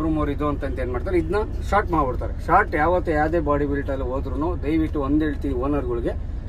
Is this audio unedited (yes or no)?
yes